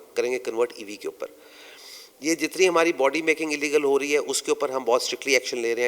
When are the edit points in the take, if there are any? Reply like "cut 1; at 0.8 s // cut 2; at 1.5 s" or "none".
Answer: none